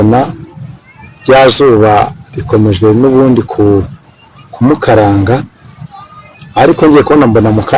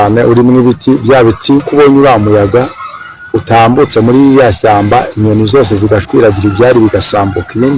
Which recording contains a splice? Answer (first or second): second